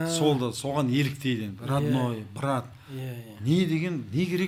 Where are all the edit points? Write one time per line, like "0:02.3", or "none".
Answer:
none